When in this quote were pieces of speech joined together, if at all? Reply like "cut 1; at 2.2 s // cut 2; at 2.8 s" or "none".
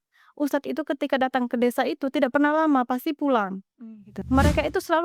cut 1; at 4.1 s